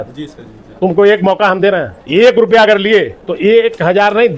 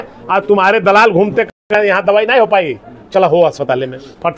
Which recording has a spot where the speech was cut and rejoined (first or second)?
first